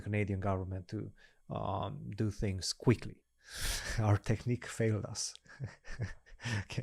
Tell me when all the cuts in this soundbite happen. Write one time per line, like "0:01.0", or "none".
0:03.2